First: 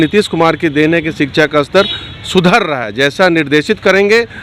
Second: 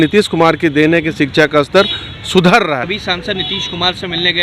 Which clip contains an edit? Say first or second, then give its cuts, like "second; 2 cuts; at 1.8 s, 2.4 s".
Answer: second; 1 cut; at 2.9 s